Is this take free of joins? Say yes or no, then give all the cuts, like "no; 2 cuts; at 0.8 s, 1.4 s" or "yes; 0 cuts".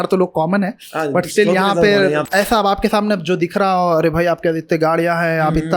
no; 1 cut; at 2.2 s